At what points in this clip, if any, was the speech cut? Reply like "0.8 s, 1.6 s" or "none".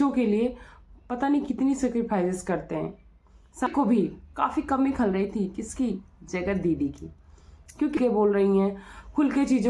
3.7 s, 8.0 s